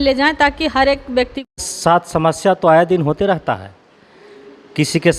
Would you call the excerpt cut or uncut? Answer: cut